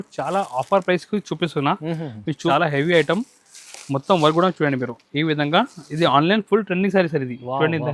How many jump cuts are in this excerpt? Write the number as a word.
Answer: one